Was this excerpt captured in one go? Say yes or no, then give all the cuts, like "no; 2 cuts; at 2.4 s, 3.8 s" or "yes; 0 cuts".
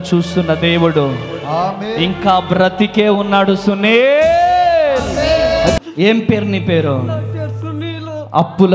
no; 1 cut; at 5.8 s